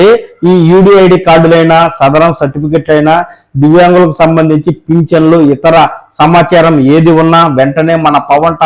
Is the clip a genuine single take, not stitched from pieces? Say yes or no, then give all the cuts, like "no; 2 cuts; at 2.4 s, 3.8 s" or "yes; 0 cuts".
yes; 0 cuts